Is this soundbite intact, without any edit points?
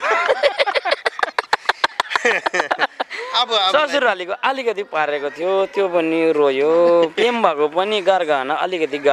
yes; 0 cuts

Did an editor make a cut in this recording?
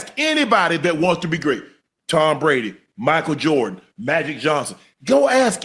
no; 0 cuts

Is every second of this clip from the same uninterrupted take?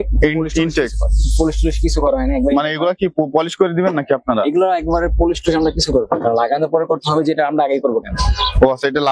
yes; 0 cuts

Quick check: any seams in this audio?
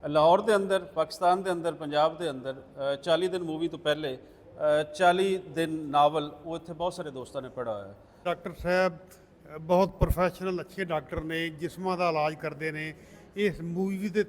yes; 1 cut; at 8.1 s

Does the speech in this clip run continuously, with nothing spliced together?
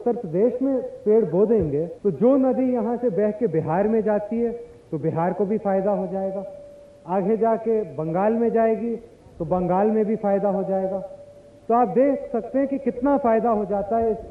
no; 1 cut; at 1.9 s

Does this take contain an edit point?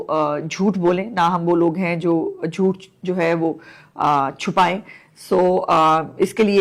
no; 0 cuts

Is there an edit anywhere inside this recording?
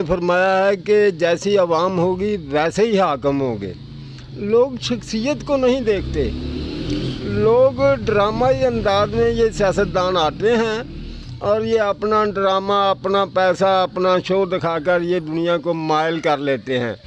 no; 0 cuts

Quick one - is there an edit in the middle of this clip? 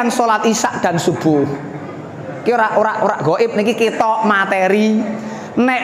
no; 0 cuts

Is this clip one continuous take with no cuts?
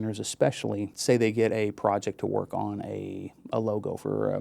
no; 1 cut; at 0.9 s

